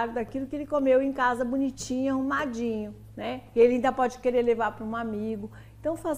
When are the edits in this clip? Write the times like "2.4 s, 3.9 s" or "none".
none